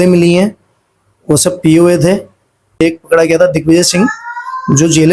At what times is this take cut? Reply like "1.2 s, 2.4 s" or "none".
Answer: 2.8 s